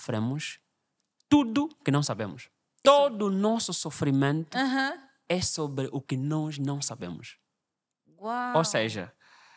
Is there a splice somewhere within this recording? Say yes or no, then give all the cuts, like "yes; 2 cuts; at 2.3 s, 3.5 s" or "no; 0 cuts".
yes; 1 cut; at 2.8 s